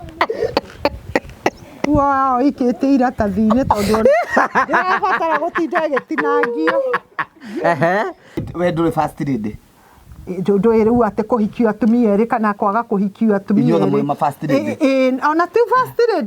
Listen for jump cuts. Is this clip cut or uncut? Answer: cut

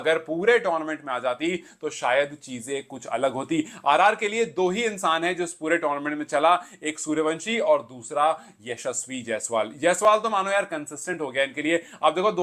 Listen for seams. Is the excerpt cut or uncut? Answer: uncut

